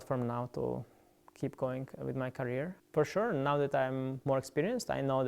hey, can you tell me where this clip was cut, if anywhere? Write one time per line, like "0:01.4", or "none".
0:02.8

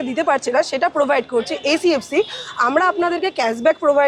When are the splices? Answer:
none

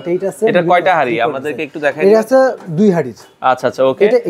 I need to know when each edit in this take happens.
none

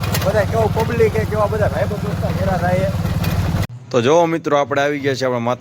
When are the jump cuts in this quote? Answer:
0:03.6

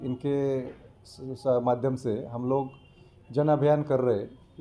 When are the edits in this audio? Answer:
none

